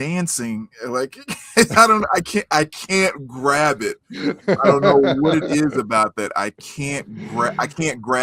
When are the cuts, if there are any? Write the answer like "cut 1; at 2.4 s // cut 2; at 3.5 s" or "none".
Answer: none